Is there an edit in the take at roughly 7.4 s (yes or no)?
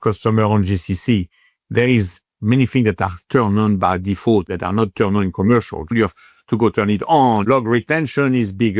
yes